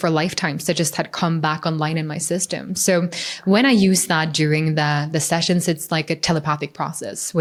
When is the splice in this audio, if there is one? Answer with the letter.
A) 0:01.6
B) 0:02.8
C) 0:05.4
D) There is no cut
D